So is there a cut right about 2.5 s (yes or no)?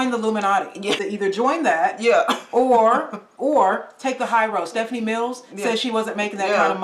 no